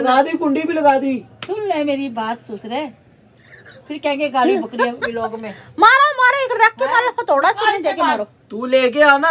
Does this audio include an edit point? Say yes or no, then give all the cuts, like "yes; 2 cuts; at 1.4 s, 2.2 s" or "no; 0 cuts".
no; 0 cuts